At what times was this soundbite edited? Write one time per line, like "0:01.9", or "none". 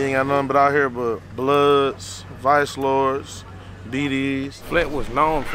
0:01.3
0:04.6

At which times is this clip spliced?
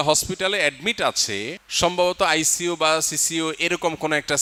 none

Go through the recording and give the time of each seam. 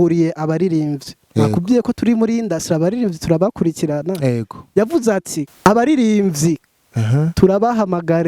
0:05.5

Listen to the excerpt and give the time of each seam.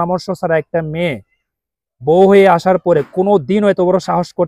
none

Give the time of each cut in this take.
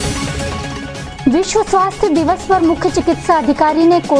none

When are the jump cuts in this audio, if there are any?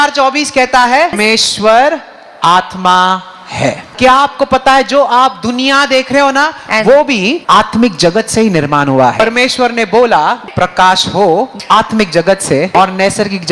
0:01.2
0:03.9
0:07.4
0:09.2
0:10.4
0:11.6
0:12.7

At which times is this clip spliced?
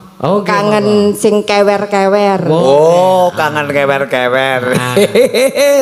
none

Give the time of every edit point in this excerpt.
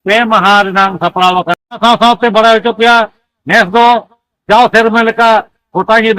0:01.8

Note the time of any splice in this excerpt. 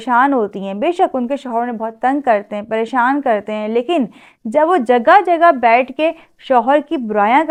none

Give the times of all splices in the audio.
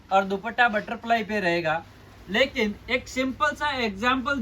none

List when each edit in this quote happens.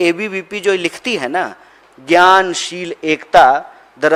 none

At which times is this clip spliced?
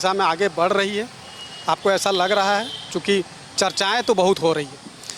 none

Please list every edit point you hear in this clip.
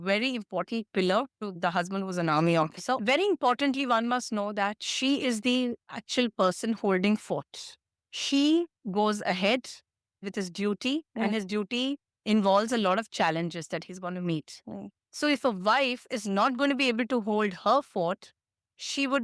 0:01.5
0:03.0
0:07.9

